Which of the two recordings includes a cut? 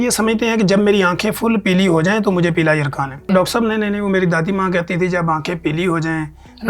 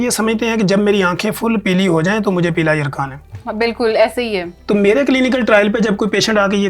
first; 1 cut; at 3.3 s

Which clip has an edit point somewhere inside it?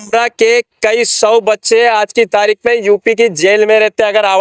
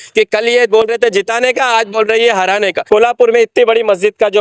second; 1 cut; at 2.8 s

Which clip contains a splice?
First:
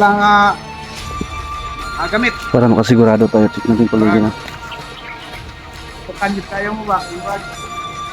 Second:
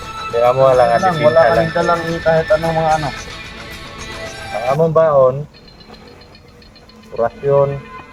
first; 3 cuts; at 4.8 s, 6.1 s, 7.4 s

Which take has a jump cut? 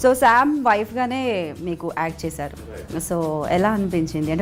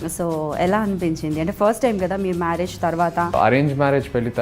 second; 1 cut; at 3.3 s

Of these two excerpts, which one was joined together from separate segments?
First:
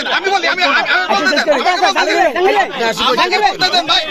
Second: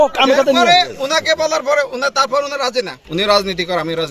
second; 1 cut; at 3.0 s

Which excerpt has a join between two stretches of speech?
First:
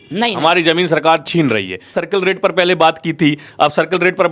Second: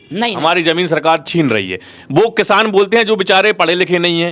first; 1 cut; at 1.9 s

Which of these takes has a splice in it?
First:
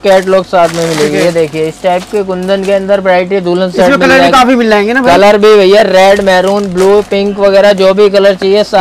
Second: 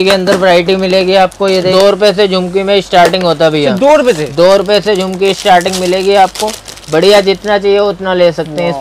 second; 1 cut; at 1.7 s

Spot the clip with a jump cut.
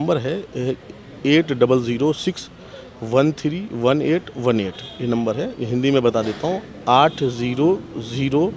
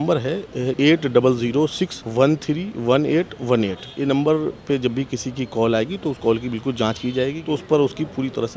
second; 4 cuts; at 0.8 s, 2.0 s, 3.8 s, 7.4 s

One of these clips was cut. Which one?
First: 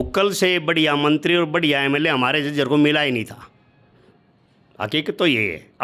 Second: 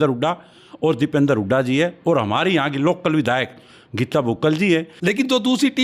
second; 1 cut; at 4.9 s

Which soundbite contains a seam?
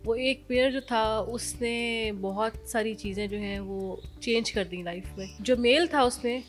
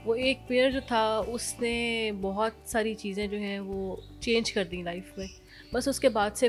first; 1 cut; at 5.3 s

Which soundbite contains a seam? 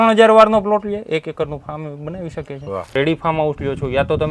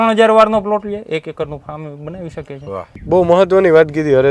first; 1 cut; at 2.9 s

